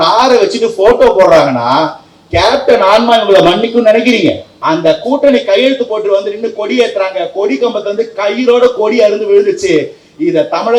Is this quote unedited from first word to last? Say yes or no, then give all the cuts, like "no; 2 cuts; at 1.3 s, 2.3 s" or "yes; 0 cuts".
no; 1 cut; at 4.5 s